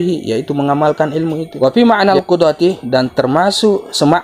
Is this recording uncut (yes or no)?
no